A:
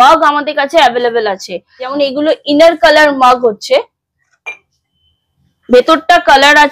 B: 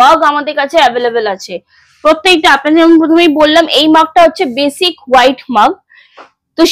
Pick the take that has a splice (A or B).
A